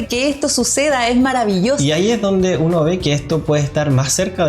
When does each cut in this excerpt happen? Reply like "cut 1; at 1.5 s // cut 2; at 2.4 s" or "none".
cut 1; at 1.8 s